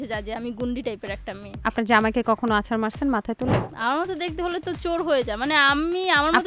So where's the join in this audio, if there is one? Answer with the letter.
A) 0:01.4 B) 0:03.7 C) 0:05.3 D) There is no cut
B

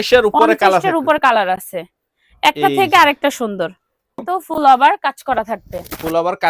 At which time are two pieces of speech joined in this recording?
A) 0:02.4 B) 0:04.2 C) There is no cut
B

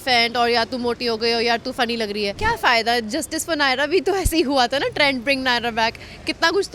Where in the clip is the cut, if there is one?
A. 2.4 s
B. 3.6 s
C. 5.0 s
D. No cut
A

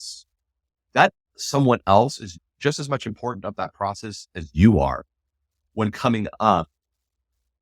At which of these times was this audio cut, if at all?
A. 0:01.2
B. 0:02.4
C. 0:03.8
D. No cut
B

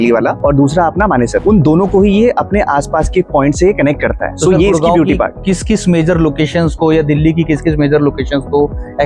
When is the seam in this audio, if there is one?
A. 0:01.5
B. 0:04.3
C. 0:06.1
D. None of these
D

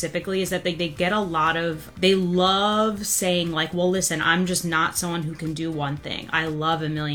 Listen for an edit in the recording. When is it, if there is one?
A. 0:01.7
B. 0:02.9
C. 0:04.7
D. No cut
D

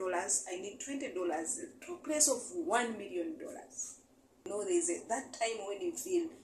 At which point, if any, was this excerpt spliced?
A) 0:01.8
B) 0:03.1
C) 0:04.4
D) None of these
C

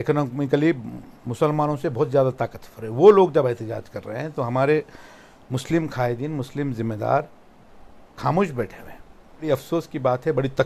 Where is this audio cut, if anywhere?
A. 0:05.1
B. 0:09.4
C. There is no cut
B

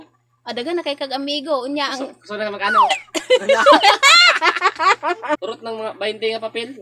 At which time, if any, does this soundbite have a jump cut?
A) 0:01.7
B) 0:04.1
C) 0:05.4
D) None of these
C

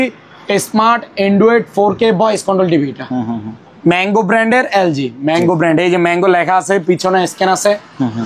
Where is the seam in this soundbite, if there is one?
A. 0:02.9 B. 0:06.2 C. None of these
C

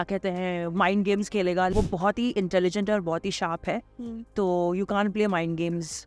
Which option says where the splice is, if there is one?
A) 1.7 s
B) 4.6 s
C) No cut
A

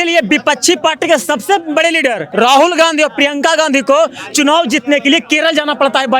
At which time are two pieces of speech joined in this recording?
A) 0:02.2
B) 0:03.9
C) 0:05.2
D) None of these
A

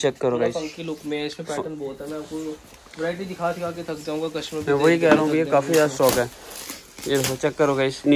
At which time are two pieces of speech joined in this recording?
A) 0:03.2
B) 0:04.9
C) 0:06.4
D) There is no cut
D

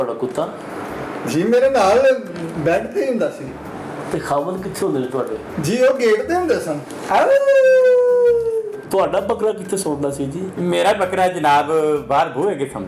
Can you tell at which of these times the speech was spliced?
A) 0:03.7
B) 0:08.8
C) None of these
B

